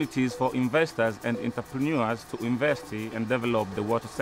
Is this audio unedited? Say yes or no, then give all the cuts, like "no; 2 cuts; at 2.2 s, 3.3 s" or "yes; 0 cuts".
yes; 0 cuts